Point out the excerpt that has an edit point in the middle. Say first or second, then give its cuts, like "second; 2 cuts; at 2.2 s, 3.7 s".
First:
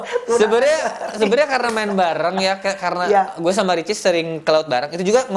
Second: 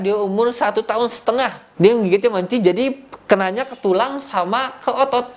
second; 1 cut; at 1.6 s